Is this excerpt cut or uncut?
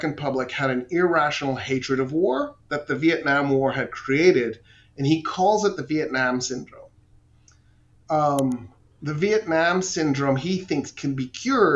uncut